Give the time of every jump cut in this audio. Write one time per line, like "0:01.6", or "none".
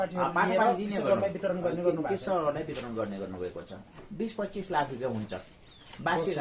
0:03.9